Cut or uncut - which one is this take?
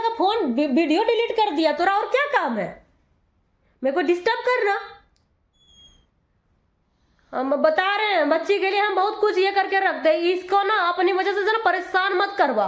uncut